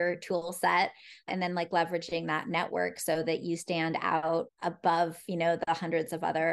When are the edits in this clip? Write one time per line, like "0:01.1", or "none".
0:01.3
0:04.5